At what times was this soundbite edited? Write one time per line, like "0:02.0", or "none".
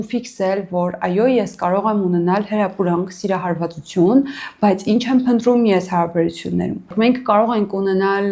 0:06.9